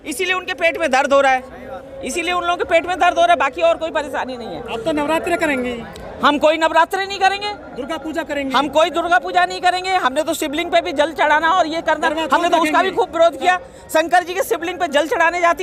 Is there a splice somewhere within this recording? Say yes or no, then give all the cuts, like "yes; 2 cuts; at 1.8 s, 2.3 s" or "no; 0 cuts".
no; 0 cuts